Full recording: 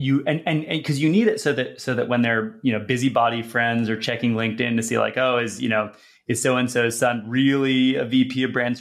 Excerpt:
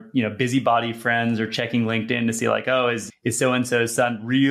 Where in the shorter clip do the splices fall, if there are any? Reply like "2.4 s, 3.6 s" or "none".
3.0 s